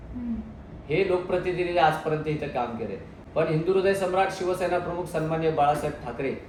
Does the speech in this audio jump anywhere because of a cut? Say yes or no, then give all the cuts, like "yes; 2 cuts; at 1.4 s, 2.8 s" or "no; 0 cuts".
no; 0 cuts